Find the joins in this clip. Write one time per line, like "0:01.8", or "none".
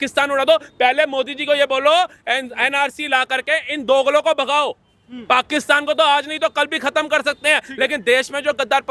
none